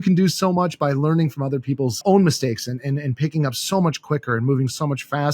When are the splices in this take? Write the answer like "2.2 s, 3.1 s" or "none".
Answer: 2.0 s